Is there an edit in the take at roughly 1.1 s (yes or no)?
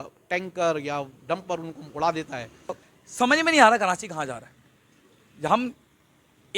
no